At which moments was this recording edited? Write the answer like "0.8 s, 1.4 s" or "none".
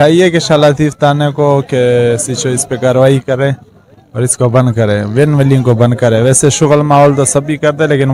none